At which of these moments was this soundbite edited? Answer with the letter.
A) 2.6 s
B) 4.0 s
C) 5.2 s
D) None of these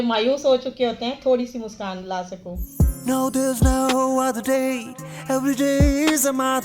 A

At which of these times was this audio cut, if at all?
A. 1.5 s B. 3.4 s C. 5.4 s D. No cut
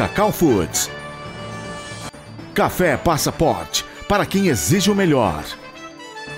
C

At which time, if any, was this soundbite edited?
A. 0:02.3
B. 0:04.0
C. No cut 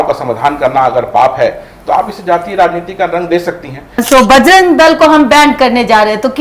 B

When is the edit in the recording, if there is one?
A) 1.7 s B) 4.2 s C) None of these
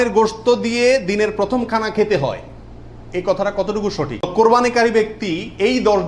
B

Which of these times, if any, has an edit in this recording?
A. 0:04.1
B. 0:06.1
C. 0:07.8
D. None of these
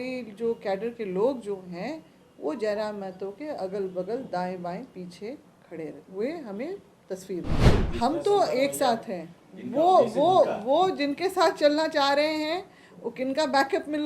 C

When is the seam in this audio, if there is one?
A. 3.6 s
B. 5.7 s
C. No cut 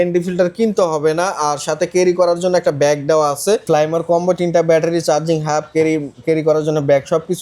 A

